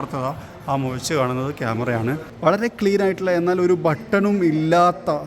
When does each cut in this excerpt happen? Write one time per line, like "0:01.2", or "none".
0:02.3

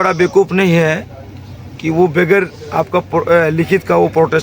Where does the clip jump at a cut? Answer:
none

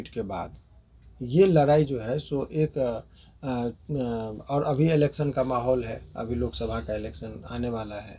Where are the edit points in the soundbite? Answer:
none

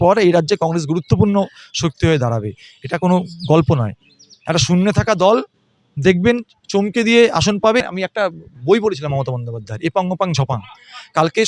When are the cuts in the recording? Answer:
0:07.8

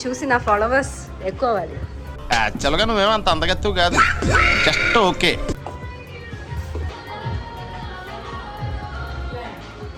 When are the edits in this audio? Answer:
none

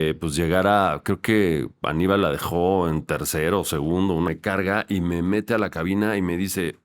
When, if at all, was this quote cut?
0:04.3

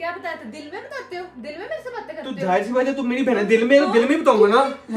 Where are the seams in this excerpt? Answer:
none

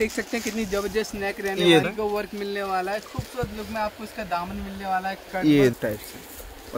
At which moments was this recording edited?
0:01.8
0:05.8

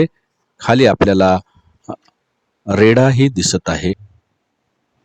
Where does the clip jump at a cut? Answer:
0:04.0

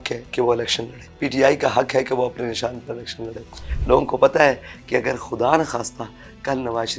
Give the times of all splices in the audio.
0:01.0
0:03.7

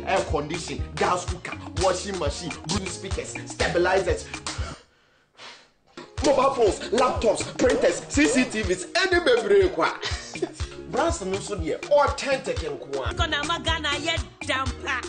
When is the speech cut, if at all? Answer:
0:02.8
0:13.1

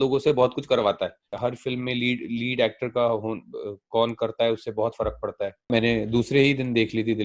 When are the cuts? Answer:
0:01.3
0:05.7

